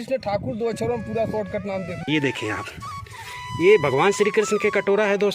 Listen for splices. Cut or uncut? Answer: cut